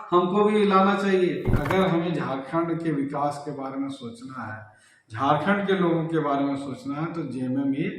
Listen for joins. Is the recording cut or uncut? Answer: cut